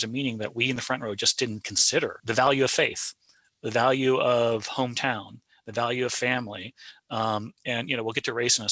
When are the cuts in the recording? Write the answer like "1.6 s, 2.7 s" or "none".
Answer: 2.2 s

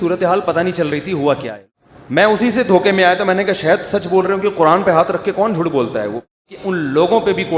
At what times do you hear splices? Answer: 1.5 s, 6.3 s

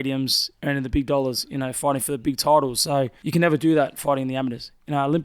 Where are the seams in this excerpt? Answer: 3.2 s

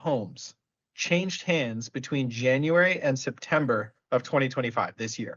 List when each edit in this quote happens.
none

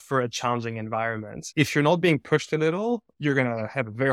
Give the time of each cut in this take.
1.4 s, 3.1 s

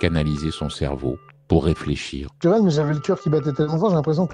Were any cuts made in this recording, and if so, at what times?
2.4 s

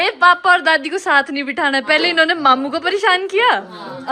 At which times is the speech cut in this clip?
none

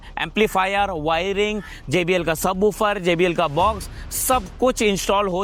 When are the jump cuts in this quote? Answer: none

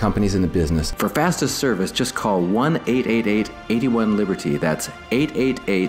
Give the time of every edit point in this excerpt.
0.9 s

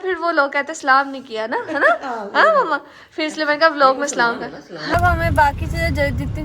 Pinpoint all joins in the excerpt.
4.9 s

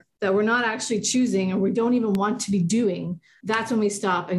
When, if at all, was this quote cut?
none

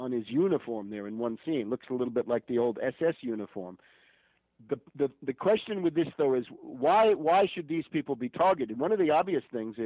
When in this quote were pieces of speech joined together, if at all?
none

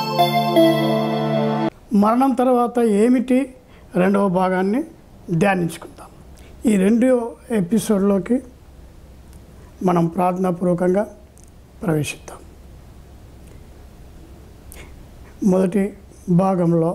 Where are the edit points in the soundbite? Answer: 1.5 s

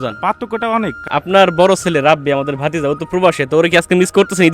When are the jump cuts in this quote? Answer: 1.1 s

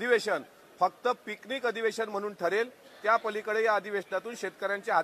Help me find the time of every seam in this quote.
none

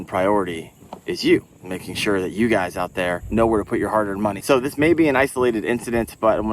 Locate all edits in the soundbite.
3.2 s, 4.4 s

